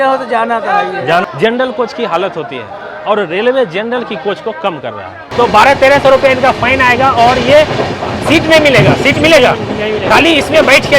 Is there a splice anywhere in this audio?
yes; 2 cuts; at 1.2 s, 5.2 s

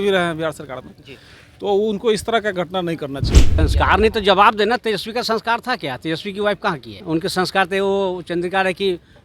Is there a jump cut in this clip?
yes; 2 cuts; at 3.4 s, 7.0 s

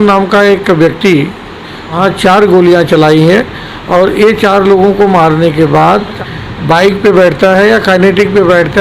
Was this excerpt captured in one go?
no; 2 cuts; at 2.0 s, 6.2 s

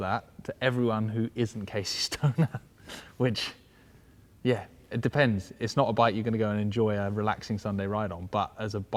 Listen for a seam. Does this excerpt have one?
no; 0 cuts

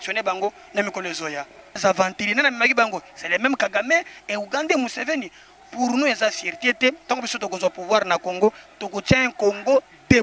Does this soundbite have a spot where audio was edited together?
yes; 1 cut; at 1.7 s

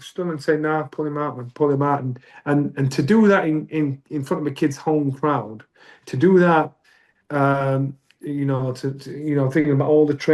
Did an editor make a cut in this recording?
no; 0 cuts

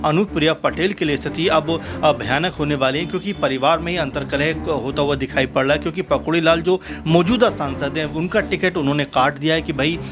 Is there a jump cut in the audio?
no; 0 cuts

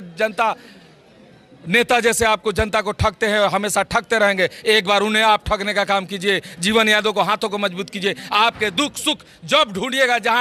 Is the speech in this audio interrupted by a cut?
no; 0 cuts

